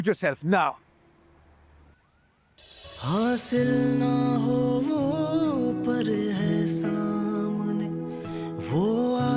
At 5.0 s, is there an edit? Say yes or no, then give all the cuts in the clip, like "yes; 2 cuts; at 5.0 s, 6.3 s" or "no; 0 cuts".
no; 1 cut; at 2.6 s